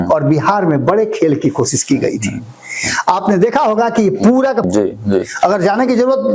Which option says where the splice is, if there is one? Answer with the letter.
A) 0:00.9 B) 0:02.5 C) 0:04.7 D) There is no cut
C